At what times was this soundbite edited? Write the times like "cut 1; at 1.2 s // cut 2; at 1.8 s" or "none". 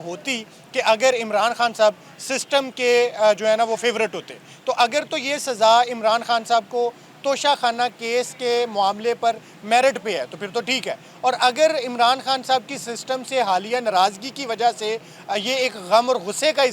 none